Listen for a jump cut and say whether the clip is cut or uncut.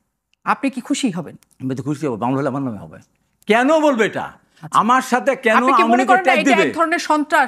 uncut